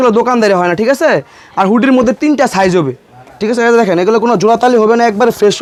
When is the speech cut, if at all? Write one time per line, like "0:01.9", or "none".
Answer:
none